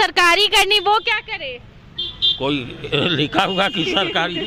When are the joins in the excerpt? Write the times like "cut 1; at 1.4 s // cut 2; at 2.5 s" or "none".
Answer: none